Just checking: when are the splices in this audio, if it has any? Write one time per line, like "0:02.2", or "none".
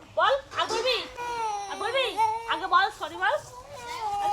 0:01.2